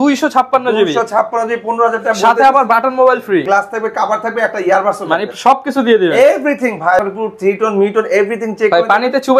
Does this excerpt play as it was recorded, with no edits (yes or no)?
no